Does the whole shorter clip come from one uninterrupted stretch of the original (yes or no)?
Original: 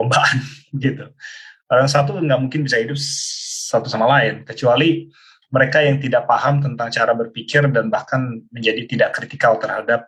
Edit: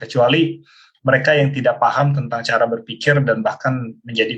yes